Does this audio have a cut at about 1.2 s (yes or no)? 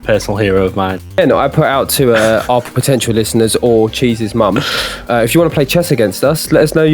yes